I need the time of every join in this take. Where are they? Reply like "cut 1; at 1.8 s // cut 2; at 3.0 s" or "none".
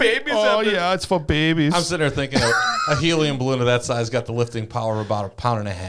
none